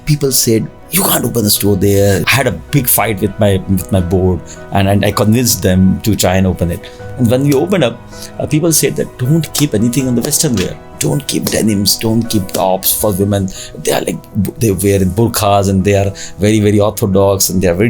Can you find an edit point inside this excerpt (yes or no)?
yes